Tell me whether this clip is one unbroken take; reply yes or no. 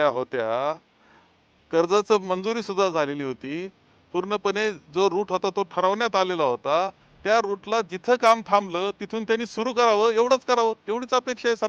yes